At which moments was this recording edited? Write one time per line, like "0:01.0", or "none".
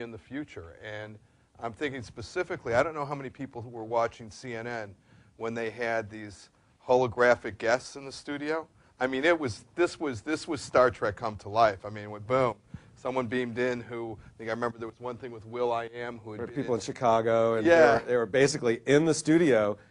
none